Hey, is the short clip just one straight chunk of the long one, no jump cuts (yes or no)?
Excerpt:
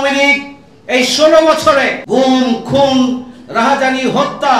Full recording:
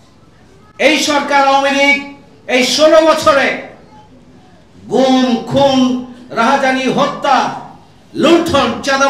no